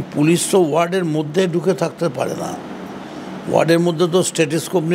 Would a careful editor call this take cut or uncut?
uncut